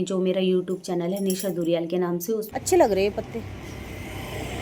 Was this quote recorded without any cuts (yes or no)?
no